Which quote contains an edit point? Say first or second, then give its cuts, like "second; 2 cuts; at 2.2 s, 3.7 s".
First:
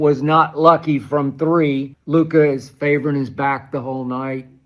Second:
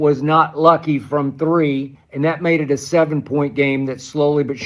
first; 1 cut; at 1.9 s